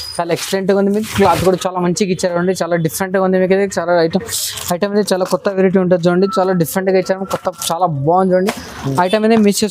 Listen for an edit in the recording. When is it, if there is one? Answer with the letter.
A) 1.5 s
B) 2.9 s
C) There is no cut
C